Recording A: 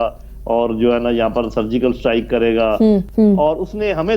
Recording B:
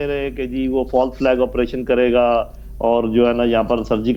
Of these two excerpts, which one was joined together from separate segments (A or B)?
A